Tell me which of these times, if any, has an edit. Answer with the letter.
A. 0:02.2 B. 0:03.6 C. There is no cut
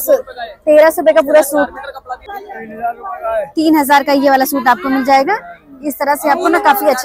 A